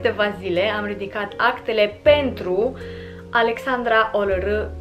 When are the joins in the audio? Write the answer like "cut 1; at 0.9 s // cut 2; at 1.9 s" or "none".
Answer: none